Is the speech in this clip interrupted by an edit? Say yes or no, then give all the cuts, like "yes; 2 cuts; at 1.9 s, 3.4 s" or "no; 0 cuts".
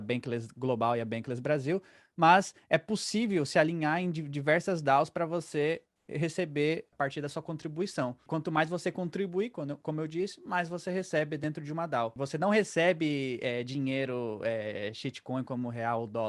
no; 0 cuts